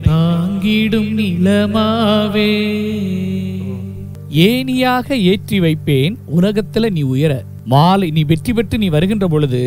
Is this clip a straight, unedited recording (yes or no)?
no